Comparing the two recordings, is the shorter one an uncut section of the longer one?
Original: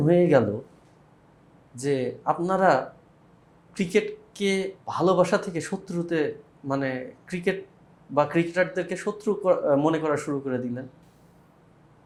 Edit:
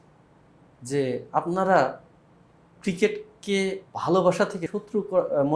no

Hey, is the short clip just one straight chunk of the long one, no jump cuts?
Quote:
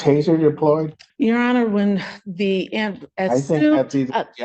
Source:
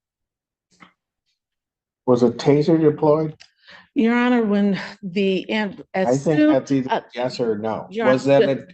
no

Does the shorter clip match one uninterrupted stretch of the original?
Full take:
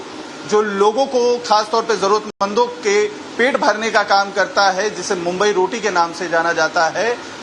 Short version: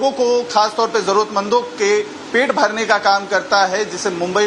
no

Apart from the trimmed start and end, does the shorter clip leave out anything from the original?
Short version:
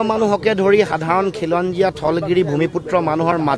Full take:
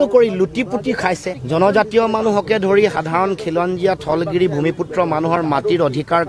no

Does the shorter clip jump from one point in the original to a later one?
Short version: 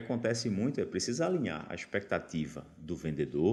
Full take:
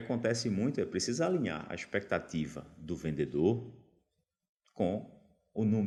no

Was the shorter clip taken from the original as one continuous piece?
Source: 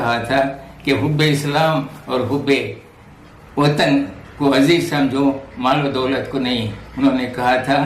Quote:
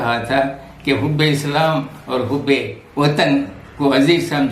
no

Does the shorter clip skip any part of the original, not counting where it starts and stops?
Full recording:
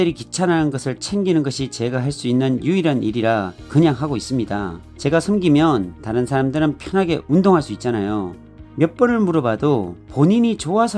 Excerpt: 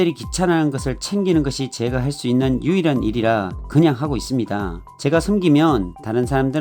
no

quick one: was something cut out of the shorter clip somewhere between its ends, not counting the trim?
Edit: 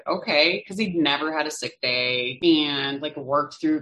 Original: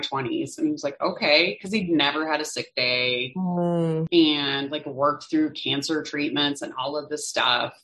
yes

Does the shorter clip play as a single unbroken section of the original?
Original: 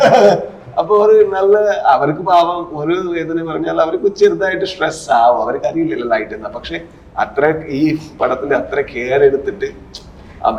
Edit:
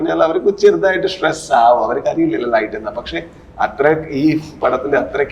yes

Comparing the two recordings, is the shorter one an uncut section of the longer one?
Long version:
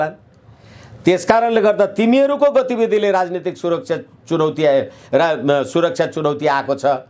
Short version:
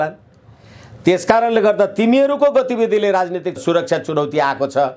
no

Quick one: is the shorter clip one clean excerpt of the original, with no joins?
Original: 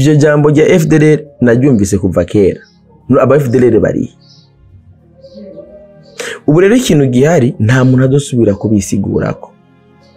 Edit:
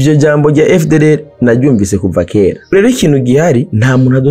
no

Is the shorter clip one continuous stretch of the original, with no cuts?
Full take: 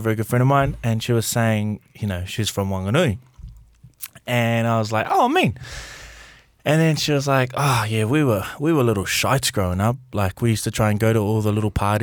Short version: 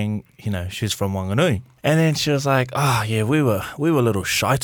no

